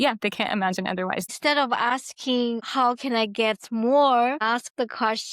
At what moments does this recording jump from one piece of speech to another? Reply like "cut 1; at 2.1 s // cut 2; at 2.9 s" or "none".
cut 1; at 1.3 s // cut 2; at 2.7 s